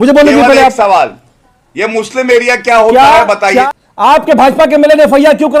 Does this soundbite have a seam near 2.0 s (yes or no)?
no